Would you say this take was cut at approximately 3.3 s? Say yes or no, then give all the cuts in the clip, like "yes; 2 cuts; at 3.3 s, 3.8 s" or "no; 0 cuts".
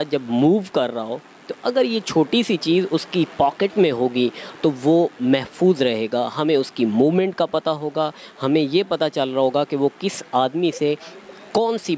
no; 0 cuts